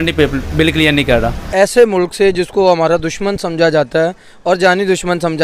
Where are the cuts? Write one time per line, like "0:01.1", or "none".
0:01.4